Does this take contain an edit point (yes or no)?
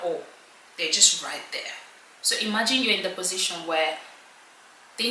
no